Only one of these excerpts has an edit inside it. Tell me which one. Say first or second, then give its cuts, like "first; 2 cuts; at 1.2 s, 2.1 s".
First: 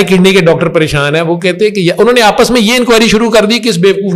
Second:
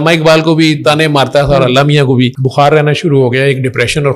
second; 1 cut; at 2.4 s